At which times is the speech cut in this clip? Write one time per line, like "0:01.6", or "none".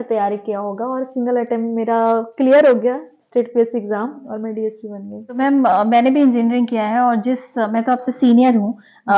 none